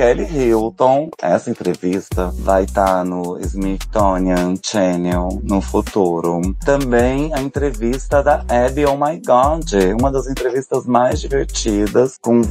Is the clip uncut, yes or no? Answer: no